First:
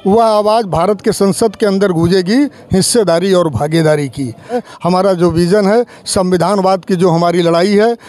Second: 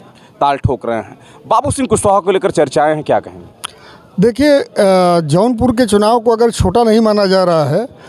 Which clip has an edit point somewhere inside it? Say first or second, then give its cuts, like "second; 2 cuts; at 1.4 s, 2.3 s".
first; 1 cut; at 4.6 s